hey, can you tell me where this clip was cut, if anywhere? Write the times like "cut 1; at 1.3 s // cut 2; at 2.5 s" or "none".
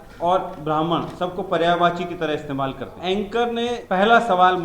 cut 1; at 3.0 s // cut 2; at 3.8 s